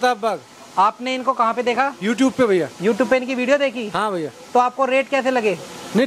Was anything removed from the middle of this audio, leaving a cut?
no; 0 cuts

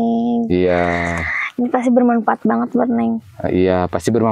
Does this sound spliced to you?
no; 0 cuts

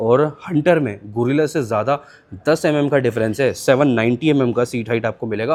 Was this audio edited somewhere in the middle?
no; 0 cuts

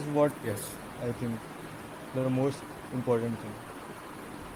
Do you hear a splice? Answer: no; 0 cuts

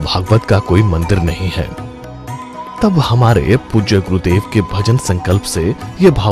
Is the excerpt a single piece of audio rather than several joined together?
no; 1 cut; at 3.9 s

